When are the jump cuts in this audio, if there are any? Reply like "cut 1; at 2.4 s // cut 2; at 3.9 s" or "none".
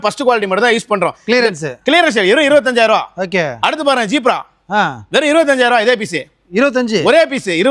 none

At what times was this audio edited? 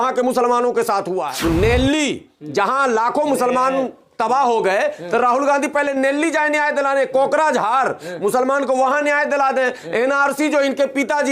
cut 1; at 1.3 s

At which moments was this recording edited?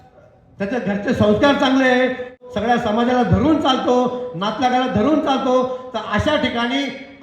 cut 1; at 2.4 s

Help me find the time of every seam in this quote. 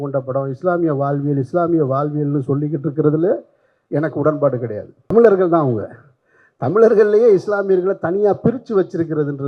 cut 1; at 5.1 s

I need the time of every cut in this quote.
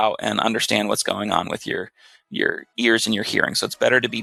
none

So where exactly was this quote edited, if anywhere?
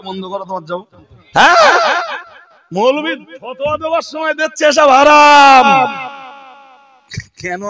cut 1; at 1.1 s

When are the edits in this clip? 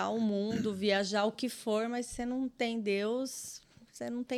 none

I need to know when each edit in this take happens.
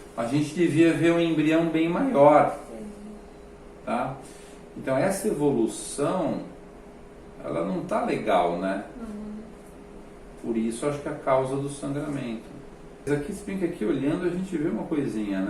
cut 1; at 13.1 s

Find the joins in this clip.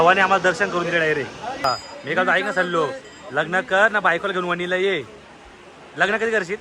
cut 1; at 1.6 s

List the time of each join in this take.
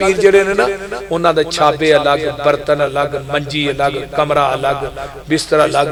none

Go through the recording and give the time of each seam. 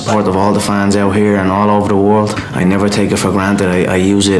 none

